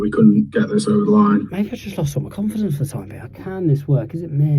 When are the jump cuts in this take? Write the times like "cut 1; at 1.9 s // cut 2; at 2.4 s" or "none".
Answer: cut 1; at 1.5 s // cut 2; at 3.3 s